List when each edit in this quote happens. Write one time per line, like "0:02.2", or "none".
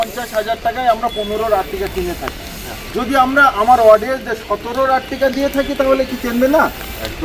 none